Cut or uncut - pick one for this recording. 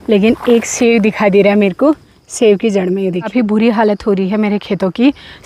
cut